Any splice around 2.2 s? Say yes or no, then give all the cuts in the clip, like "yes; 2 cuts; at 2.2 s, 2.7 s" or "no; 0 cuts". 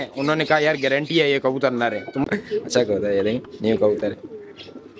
yes; 1 cut; at 2.2 s